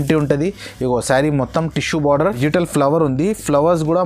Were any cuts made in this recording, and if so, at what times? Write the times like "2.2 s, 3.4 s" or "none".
2.4 s